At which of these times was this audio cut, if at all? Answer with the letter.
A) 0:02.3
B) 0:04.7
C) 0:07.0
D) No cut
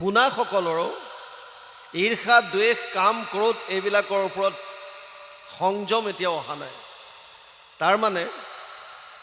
D